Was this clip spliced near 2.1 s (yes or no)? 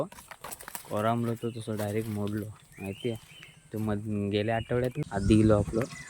no